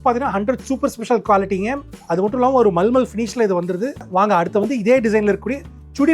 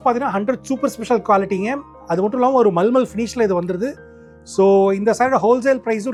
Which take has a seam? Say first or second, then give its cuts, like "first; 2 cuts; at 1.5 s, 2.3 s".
first; 1 cut; at 4.1 s